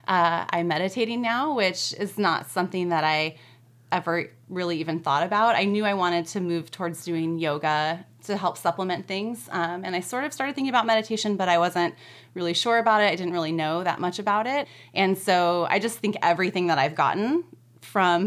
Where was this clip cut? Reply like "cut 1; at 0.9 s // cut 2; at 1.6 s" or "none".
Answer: none